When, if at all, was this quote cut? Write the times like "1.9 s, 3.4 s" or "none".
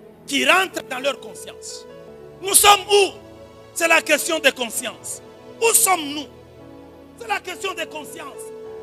2.6 s

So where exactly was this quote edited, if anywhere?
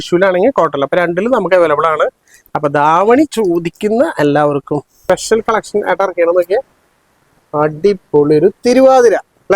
5.0 s

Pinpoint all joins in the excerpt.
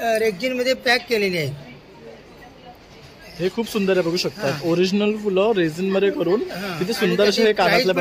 none

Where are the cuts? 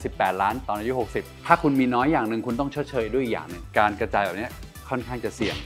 1.3 s, 3.6 s

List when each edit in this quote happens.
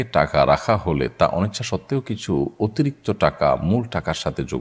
none

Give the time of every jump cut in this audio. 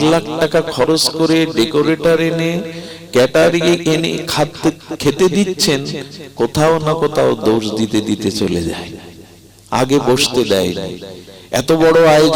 none

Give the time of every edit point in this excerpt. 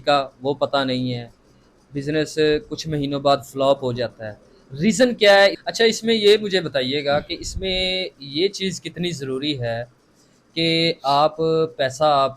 5.6 s

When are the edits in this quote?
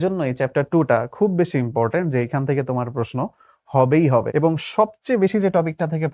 4.3 s

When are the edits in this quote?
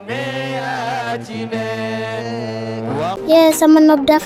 3.2 s

